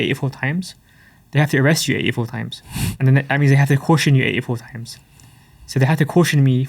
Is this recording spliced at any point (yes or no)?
no